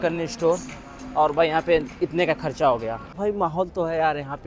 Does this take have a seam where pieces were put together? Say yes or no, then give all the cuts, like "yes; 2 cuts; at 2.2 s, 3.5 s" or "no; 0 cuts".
yes; 1 cut; at 3.3 s